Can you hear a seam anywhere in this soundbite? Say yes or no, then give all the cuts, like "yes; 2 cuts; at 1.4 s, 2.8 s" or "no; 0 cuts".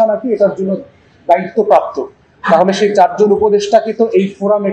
no; 0 cuts